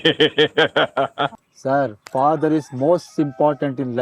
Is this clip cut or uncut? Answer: cut